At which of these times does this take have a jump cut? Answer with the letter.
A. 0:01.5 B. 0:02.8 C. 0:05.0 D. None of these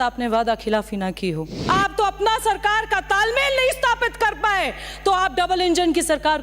A